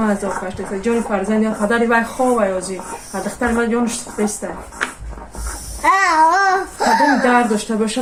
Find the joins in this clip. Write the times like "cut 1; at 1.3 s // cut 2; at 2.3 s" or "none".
none